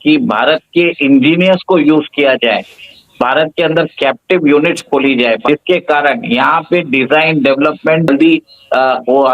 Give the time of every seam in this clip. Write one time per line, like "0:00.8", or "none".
0:05.4
0:08.1